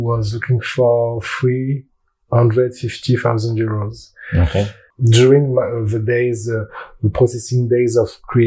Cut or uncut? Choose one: uncut